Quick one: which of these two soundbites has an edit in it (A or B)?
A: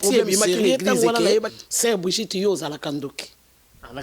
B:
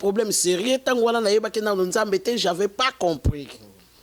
A